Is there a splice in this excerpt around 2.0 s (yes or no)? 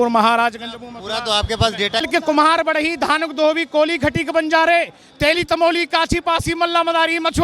yes